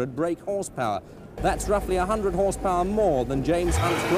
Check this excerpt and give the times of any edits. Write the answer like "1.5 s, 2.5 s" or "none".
1.2 s